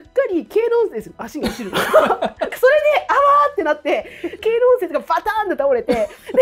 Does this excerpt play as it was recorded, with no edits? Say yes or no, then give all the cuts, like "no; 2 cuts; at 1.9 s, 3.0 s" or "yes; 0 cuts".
no; 2 cuts; at 2.5 s, 4.3 s